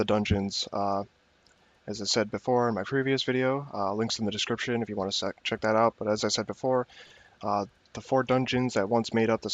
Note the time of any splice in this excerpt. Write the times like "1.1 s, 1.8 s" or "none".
none